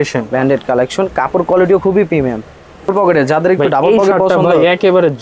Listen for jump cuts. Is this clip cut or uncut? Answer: cut